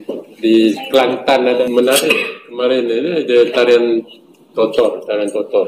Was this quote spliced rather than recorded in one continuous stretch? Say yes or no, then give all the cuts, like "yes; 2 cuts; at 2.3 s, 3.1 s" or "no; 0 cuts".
yes; 1 cut; at 1.6 s